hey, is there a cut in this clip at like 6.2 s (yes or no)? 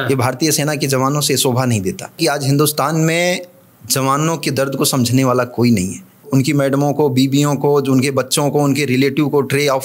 yes